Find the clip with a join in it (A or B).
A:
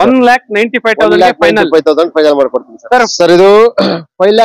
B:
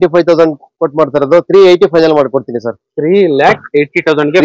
A